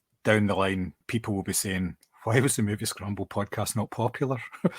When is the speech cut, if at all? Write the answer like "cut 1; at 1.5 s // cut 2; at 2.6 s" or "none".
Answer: cut 1; at 1.0 s